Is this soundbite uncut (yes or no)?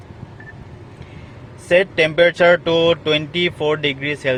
yes